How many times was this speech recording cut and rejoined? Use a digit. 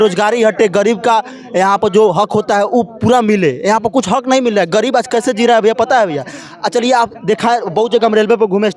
0